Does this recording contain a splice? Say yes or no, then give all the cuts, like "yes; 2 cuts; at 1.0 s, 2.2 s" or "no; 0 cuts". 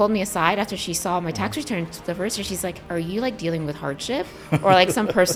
no; 0 cuts